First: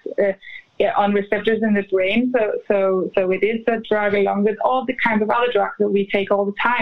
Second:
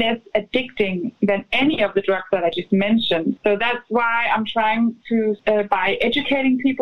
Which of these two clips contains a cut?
second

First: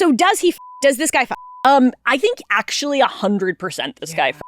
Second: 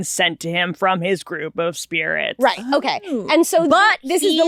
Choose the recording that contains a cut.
first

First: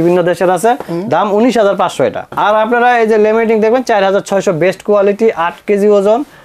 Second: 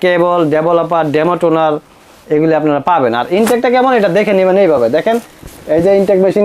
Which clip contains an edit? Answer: first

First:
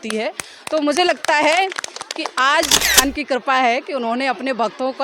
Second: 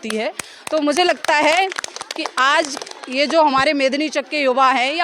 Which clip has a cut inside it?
first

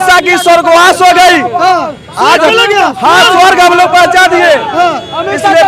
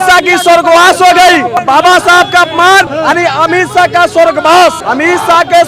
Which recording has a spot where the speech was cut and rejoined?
second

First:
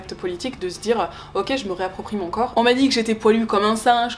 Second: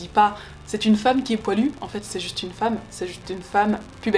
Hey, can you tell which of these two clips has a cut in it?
first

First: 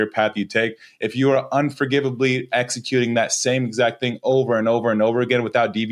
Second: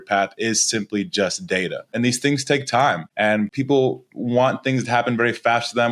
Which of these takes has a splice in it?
second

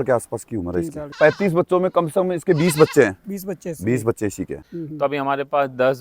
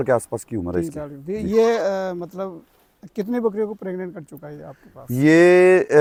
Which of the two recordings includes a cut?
first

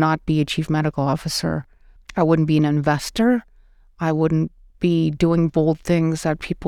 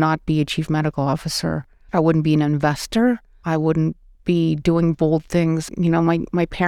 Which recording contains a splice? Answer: second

